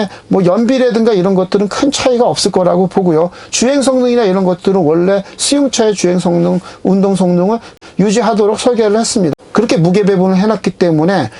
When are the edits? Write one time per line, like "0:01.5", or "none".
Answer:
0:09.4